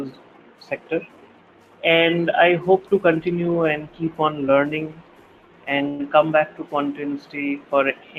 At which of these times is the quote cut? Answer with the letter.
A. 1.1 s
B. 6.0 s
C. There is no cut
C